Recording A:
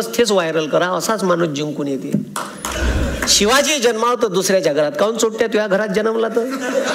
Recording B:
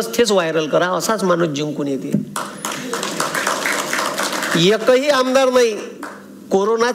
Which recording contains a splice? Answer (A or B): A